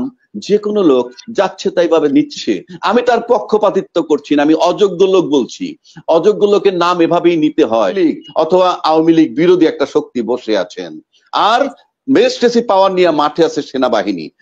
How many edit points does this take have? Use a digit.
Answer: 1